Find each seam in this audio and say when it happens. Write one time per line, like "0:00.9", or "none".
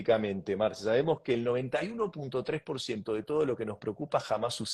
none